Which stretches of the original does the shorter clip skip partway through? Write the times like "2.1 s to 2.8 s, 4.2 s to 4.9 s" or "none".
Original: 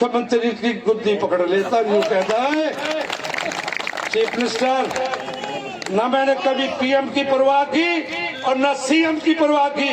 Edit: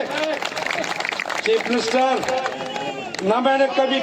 none